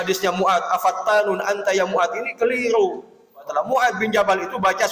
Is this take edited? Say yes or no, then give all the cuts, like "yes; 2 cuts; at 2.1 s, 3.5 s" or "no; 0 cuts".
yes; 1 cut; at 3.5 s